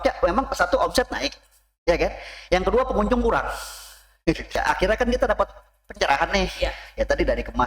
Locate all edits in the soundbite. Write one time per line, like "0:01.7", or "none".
0:04.5